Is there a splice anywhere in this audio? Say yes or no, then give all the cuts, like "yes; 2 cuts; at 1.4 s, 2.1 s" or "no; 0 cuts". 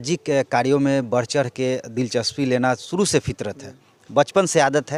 no; 0 cuts